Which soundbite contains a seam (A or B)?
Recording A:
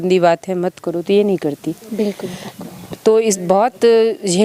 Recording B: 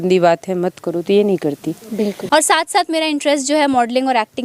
B